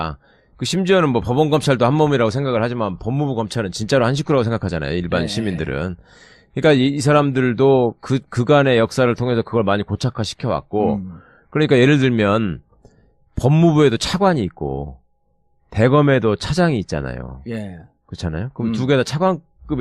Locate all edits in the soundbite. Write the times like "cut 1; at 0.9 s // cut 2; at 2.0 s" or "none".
none